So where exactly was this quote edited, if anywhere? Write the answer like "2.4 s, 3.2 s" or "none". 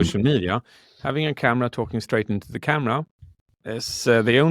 1.0 s